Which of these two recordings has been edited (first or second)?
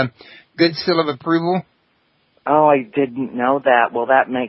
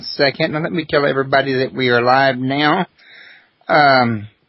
first